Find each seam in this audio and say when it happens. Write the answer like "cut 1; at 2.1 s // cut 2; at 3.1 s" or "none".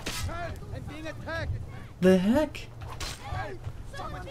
none

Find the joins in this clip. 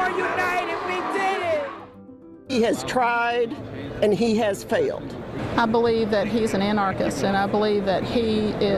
cut 1; at 2.1 s

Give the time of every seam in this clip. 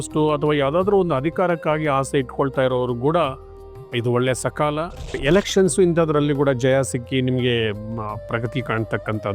cut 1; at 5.1 s

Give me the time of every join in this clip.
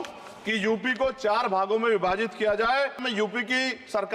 cut 1; at 3.1 s

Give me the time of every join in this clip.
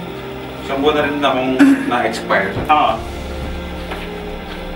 none

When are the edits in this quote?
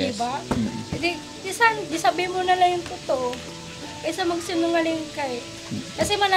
none

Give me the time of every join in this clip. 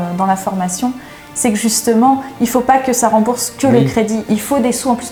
none

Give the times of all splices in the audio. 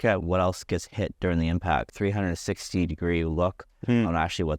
cut 1; at 1.9 s

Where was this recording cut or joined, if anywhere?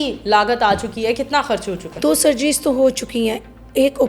cut 1; at 2.0 s

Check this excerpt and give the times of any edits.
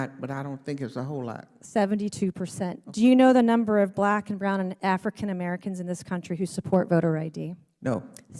none

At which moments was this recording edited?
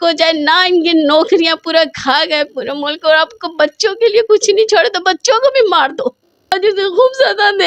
cut 1; at 6.5 s

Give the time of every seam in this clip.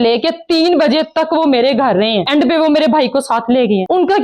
cut 1; at 2.2 s

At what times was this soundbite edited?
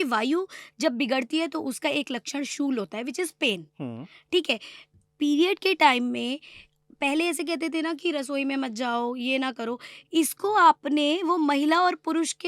none

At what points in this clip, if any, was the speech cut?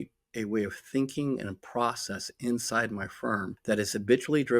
cut 1; at 3.5 s

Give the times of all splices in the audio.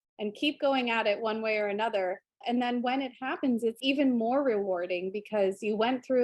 cut 1; at 2.4 s

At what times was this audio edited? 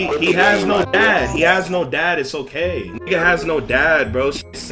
cut 1; at 3.1 s

